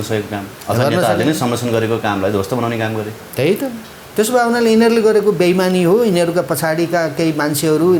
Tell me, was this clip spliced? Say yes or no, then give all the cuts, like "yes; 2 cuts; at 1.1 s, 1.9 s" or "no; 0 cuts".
no; 0 cuts